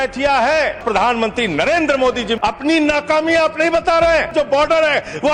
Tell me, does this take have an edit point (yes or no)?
yes